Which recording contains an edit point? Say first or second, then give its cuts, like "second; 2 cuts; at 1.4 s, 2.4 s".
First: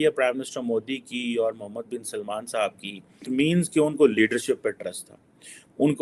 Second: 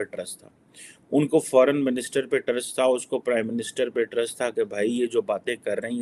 first; 1 cut; at 3.3 s